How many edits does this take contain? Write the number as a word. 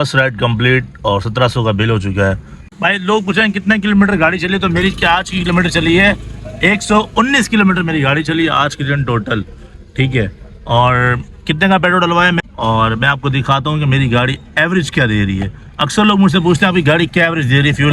two